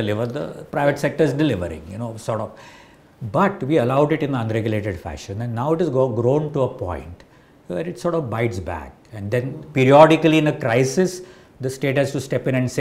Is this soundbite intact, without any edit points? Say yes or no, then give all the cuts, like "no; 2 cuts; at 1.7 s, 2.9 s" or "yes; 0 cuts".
yes; 0 cuts